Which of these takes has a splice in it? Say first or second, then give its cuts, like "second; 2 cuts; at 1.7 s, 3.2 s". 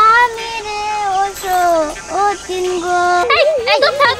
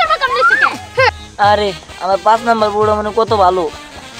second; 1 cut; at 1.2 s